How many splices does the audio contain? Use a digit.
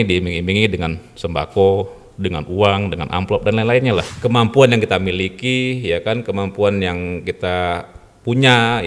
1